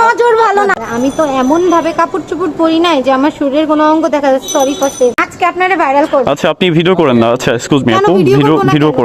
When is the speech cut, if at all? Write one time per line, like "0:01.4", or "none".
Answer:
0:00.7
0:05.3